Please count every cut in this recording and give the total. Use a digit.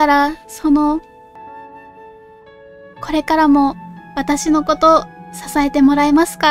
1